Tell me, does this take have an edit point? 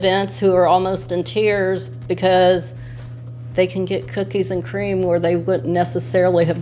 no; 0 cuts

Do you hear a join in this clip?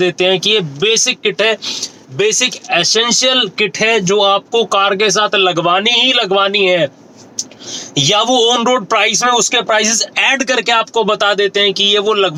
no; 0 cuts

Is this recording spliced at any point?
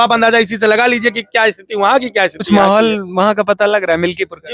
yes; 1 cut; at 2.4 s

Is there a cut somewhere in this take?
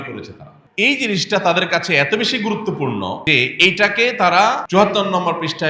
yes; 3 cuts; at 0.9 s, 3.2 s, 4.6 s

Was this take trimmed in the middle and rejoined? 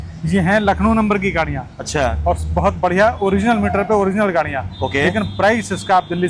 no; 0 cuts

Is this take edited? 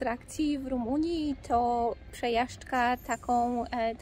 no; 0 cuts

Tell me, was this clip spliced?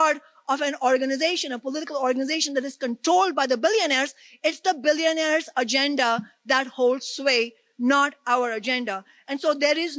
no; 0 cuts

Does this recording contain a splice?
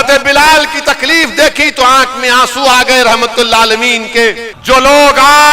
yes; 1 cut; at 4.5 s

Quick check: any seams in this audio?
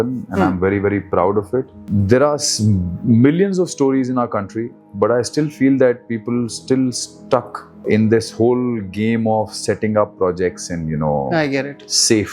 yes; 2 cuts; at 1.8 s, 7.8 s

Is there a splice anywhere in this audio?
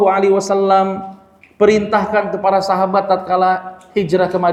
no; 0 cuts

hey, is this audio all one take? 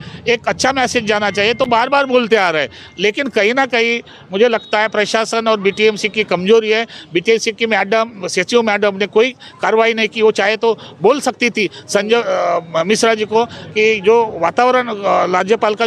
yes; 0 cuts

